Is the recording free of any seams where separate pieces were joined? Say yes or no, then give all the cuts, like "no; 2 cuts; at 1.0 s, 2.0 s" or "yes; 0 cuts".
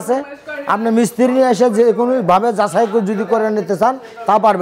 yes; 0 cuts